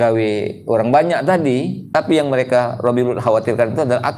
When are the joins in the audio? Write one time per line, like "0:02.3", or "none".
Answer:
0:01.8